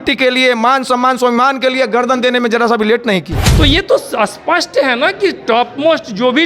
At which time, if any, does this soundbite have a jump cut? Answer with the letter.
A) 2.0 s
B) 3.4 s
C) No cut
B